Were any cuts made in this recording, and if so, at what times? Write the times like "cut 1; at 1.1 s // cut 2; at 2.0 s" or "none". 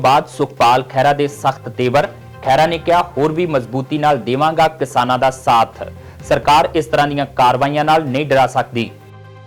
none